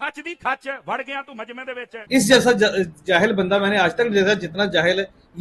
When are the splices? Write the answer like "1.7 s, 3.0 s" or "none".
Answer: 2.0 s